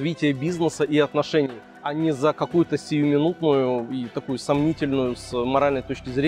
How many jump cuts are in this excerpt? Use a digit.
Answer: 0